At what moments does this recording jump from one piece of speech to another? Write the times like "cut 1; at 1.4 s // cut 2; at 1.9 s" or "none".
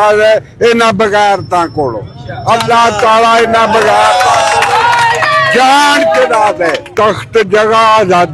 cut 1; at 6.8 s